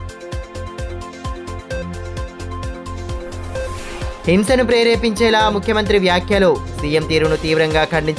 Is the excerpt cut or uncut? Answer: cut